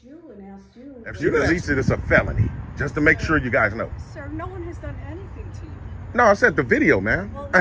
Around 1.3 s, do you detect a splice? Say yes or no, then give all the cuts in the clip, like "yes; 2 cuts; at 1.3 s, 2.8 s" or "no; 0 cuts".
yes; 1 cut; at 1.3 s